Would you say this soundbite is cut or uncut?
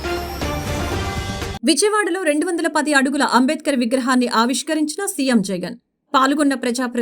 cut